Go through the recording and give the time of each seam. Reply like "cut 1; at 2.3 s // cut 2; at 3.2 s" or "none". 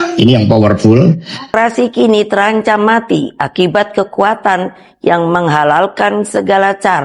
cut 1; at 1.5 s